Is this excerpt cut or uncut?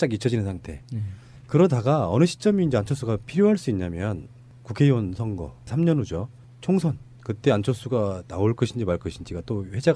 cut